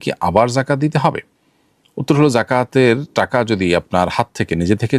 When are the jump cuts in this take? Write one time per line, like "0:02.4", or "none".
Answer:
none

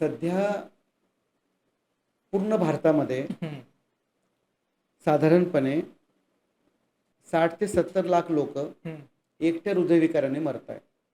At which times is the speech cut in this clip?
0:07.0

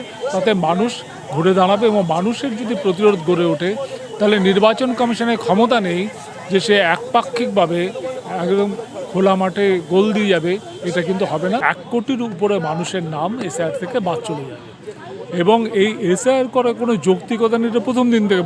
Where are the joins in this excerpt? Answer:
0:11.6

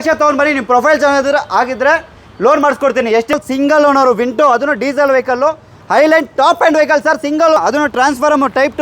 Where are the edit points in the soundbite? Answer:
0:03.3
0:07.6

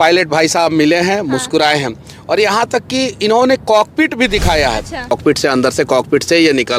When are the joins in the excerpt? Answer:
0:05.1

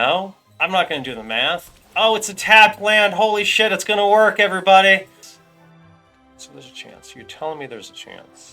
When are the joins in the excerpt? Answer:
0:05.2

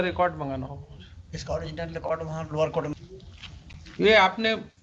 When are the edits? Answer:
0:02.9

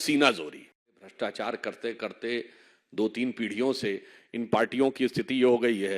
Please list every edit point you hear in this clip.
0:01.1

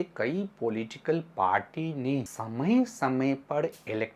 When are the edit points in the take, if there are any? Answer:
0:02.4

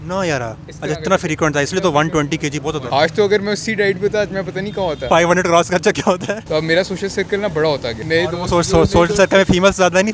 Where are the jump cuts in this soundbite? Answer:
0:02.8
0:05.0
0:06.4
0:07.9

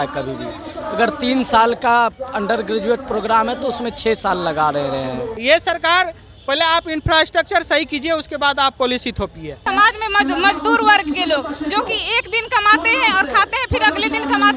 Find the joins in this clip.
0:05.3
0:09.6

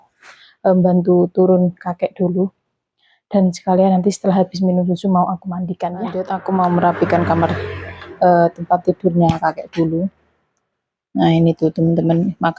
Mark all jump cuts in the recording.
0:06.3

